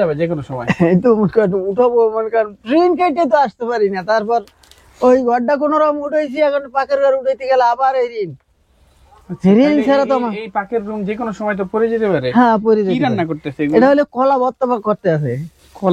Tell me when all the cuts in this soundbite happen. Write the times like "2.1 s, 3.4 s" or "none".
none

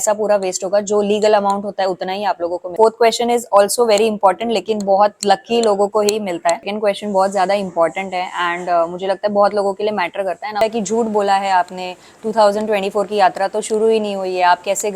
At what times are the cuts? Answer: 2.7 s, 6.7 s, 10.6 s

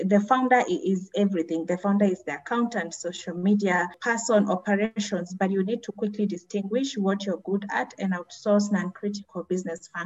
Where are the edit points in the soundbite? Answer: none

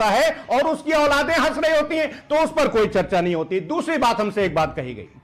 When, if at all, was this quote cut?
none

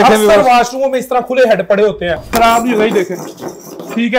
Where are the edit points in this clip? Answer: 2.2 s

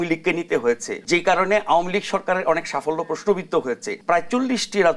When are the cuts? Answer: 0.9 s, 3.9 s

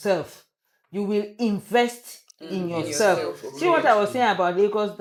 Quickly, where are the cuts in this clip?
none

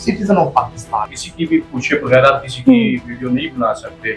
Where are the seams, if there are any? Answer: 1.0 s

